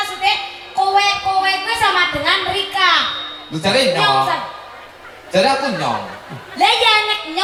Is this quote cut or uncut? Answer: uncut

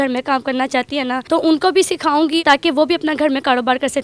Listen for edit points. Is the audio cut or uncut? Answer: cut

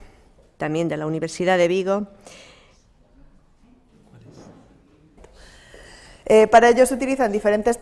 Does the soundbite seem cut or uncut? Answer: uncut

